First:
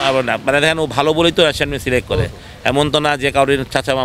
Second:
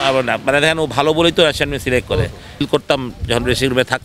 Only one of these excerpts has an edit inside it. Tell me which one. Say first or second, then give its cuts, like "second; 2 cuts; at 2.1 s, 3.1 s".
second; 1 cut; at 2.6 s